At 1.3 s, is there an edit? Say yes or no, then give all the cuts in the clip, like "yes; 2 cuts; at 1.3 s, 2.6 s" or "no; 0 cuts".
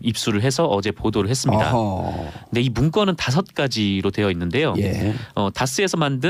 no; 0 cuts